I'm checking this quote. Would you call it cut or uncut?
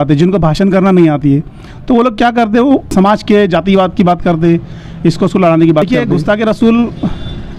cut